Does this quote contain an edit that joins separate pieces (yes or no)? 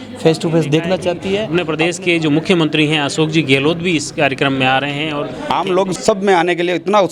yes